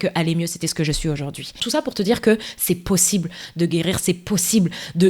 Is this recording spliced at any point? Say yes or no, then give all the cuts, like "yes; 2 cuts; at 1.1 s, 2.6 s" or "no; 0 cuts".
yes; 1 cut; at 1.6 s